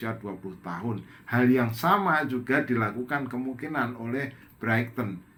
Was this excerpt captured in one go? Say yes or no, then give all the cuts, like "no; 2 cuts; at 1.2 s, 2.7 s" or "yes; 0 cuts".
yes; 0 cuts